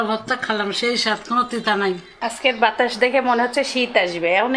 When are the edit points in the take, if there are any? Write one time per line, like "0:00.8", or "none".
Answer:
0:02.1